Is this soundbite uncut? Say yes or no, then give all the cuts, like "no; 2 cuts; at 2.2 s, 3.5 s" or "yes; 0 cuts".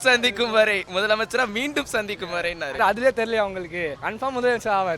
no; 2 cuts; at 2.8 s, 4.0 s